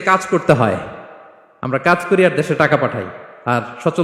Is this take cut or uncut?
uncut